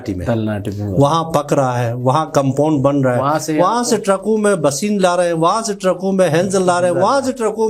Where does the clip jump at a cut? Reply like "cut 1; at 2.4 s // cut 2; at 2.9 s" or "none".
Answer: none